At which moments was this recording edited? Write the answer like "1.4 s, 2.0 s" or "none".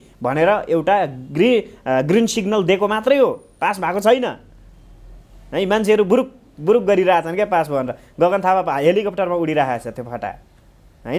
none